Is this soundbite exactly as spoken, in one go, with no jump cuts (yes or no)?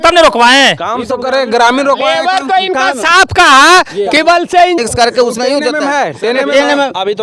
no